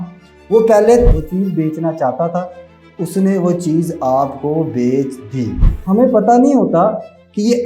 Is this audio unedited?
no; 2 cuts; at 1.1 s, 5.7 s

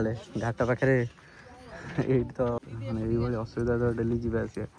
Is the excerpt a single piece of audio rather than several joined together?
no; 1 cut; at 2.6 s

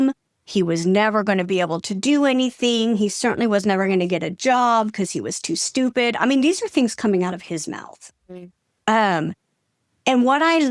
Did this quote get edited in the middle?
no; 0 cuts

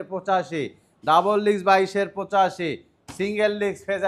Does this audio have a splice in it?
no; 0 cuts

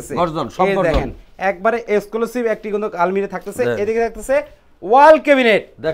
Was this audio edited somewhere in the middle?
no; 0 cuts

